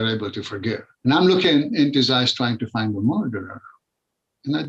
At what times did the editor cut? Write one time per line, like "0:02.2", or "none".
0:00.9